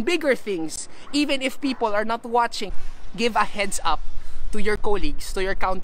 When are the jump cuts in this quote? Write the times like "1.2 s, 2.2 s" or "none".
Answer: 2.6 s